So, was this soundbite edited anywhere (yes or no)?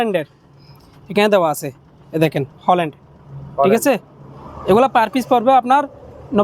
no